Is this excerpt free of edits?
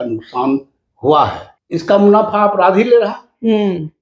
no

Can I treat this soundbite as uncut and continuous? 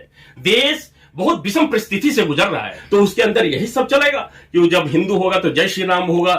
no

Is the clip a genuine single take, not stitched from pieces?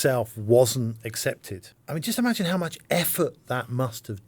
no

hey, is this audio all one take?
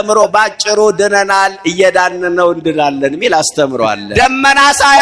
no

